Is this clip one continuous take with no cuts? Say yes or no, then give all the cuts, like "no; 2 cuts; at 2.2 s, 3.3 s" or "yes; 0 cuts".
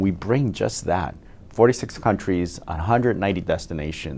yes; 0 cuts